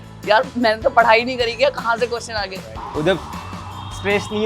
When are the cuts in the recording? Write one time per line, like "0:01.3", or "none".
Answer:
0:02.7